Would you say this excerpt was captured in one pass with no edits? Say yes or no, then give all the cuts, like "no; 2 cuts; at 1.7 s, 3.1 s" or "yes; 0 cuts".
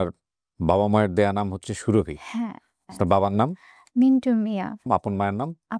yes; 0 cuts